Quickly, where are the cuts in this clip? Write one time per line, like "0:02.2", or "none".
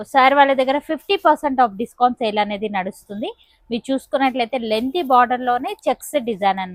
none